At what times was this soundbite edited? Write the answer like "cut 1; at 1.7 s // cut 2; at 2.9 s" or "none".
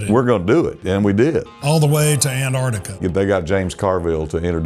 cut 1; at 1.5 s // cut 2; at 3.0 s